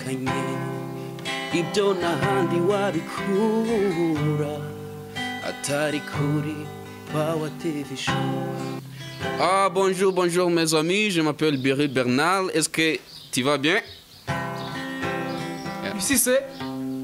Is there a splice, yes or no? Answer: yes